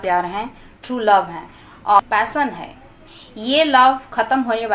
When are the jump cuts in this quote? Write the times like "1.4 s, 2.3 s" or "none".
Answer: 2.0 s